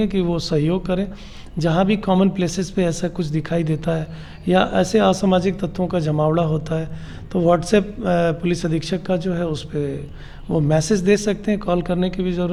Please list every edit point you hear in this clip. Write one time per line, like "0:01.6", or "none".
none